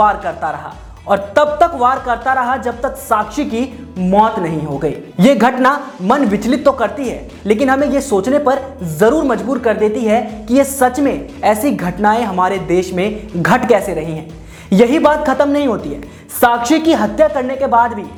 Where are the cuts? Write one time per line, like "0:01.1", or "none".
none

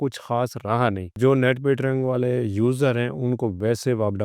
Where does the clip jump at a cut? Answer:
0:01.1

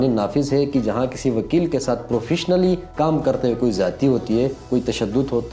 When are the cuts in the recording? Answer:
0:02.9
0:04.6

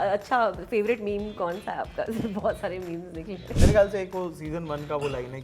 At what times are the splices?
0:03.5

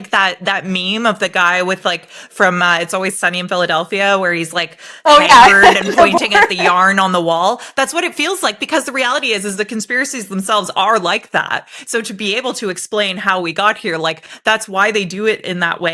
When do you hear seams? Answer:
0:14.3

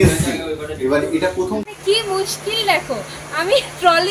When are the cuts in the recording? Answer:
0:01.6

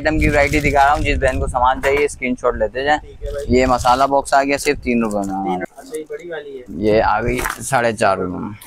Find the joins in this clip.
0:05.7

